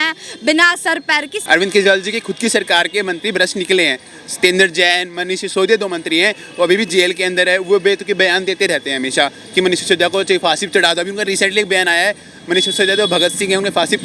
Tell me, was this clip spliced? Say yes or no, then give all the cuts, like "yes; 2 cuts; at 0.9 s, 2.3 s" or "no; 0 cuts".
yes; 1 cut; at 1.4 s